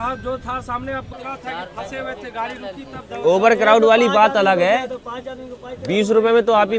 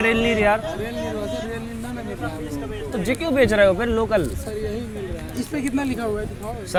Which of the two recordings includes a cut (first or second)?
first